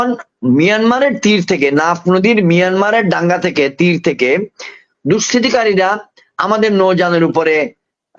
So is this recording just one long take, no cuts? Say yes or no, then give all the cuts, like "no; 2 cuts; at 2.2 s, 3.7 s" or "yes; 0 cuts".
yes; 0 cuts